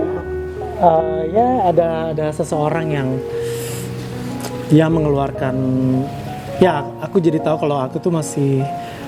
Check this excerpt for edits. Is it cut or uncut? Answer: uncut